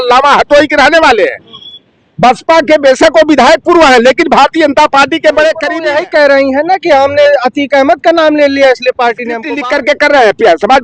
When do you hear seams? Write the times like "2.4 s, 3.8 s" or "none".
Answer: 5.7 s, 9.5 s

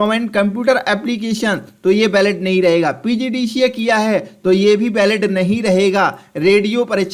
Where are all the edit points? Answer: none

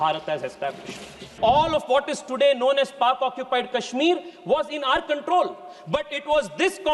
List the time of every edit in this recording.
1.4 s

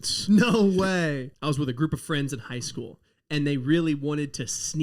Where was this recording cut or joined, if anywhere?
1.3 s

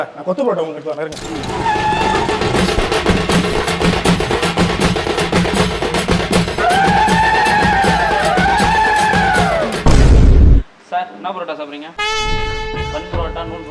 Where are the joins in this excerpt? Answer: none

